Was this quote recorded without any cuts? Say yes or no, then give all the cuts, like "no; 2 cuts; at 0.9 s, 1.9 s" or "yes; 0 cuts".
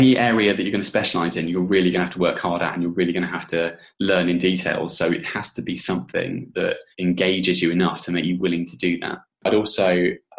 no; 2 cuts; at 6.9 s, 9.5 s